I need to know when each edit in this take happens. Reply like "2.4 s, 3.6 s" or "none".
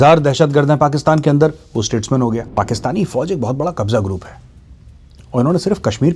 2.6 s